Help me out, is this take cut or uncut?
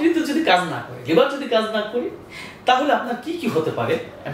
uncut